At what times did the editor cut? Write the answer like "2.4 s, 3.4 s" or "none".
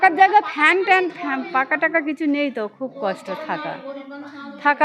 none